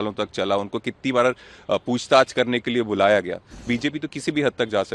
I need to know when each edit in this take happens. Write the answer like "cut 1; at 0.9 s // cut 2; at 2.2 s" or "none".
cut 1; at 3.5 s